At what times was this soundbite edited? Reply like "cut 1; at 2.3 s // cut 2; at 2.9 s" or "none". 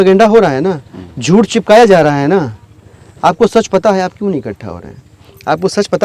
none

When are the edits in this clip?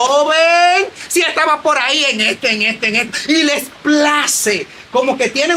none

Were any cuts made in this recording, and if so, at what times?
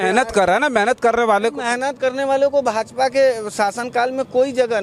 none

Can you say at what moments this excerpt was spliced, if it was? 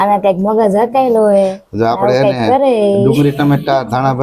none

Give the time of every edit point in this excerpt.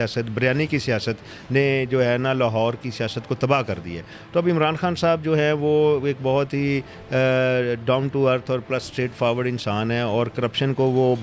none

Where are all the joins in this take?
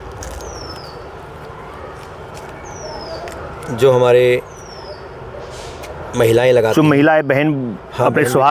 none

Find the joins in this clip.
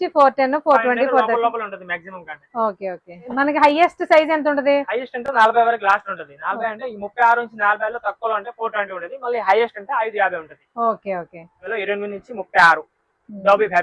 cut 1; at 3.3 s // cut 2; at 11.7 s

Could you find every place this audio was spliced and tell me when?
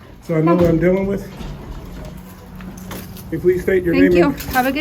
cut 1; at 3.3 s

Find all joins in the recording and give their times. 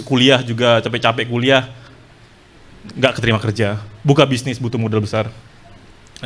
none

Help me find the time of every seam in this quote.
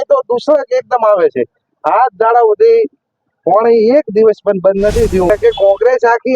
cut 1; at 5.3 s

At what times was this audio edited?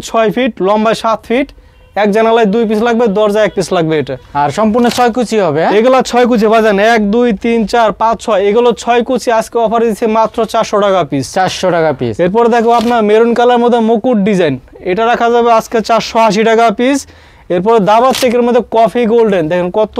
none

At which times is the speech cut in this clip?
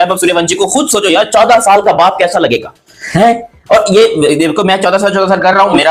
none

